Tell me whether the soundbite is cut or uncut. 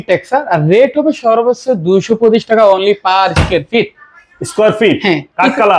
uncut